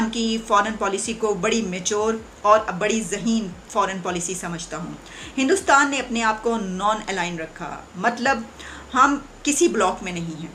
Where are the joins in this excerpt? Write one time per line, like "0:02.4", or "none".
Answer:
none